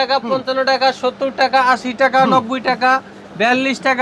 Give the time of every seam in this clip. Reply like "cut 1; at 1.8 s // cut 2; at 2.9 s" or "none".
none